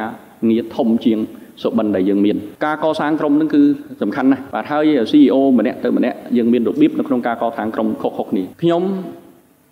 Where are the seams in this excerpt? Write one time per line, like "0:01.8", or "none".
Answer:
0:02.5
0:04.5
0:08.5